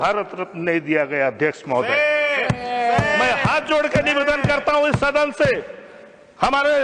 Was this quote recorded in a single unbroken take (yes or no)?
yes